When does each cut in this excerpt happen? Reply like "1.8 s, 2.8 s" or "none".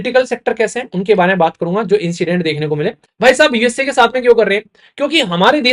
3.0 s